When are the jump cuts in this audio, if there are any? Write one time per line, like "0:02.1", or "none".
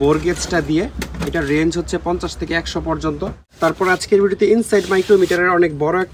0:03.4